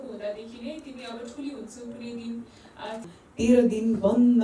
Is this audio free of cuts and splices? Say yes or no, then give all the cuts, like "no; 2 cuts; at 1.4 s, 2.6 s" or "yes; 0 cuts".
no; 1 cut; at 3.1 s